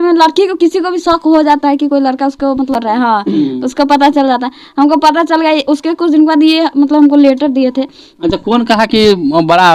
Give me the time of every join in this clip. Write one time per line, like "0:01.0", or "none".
none